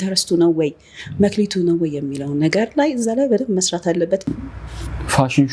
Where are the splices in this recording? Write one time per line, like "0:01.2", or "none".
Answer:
0:04.4